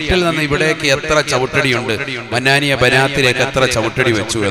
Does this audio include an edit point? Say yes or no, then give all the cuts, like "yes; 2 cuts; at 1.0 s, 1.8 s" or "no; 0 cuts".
no; 0 cuts